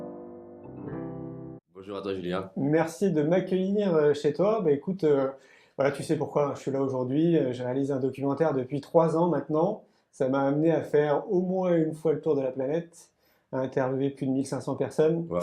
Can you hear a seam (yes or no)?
yes